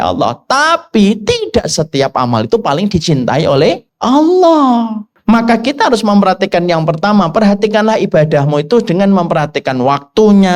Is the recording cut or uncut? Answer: cut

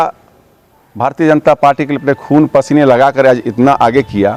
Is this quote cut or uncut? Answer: uncut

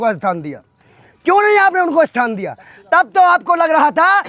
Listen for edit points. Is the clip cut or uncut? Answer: uncut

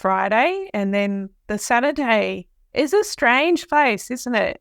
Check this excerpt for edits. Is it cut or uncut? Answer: uncut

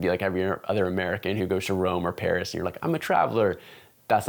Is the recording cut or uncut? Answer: uncut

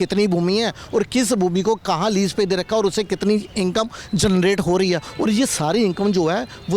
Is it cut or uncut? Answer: uncut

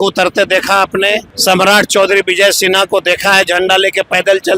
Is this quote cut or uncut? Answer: cut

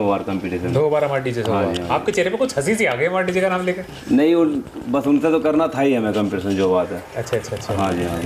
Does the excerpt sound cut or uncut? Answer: uncut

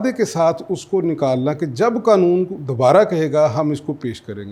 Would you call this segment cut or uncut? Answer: uncut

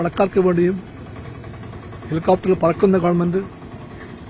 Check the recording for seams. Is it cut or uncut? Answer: uncut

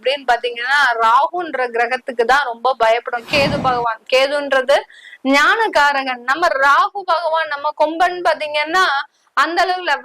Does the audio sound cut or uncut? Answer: cut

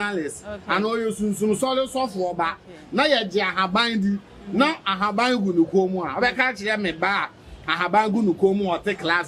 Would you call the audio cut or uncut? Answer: uncut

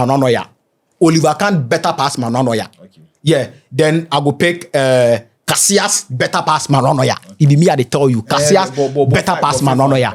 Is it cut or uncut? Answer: uncut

